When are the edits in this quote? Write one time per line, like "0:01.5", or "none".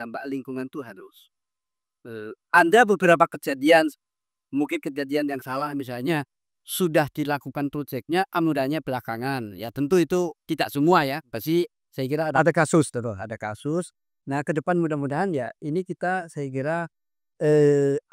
none

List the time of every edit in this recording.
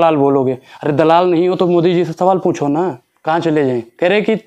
0:03.1

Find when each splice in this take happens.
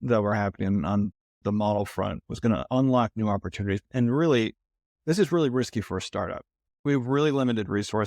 0:03.9

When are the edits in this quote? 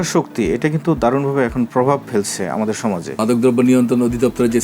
0:03.1

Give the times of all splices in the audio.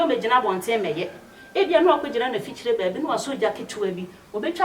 none

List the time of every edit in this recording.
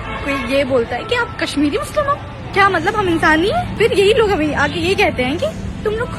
0:02.4
0:03.7

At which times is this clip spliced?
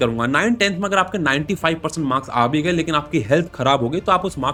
none

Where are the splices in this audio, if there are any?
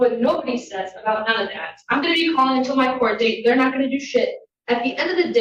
none

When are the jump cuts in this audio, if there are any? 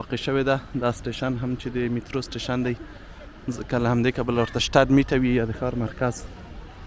none

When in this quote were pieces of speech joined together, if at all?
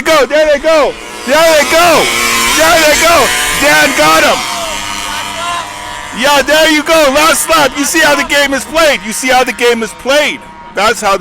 0:06.0

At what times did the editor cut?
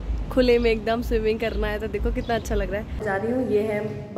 0:03.0

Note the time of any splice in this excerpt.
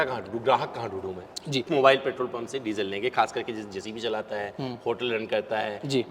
0:01.7

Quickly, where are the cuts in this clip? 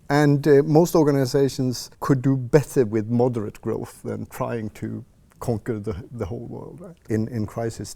0:01.9
0:06.9

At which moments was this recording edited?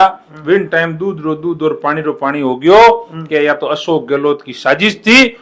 none

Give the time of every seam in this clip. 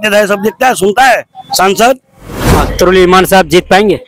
0:02.5

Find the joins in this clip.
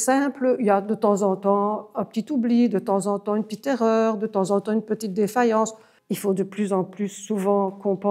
0:05.9

